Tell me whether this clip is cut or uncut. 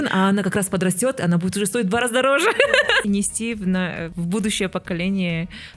cut